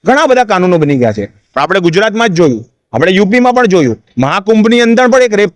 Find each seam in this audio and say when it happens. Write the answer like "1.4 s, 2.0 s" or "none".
none